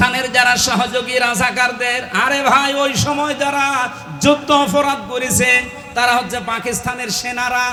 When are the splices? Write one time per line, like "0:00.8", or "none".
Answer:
none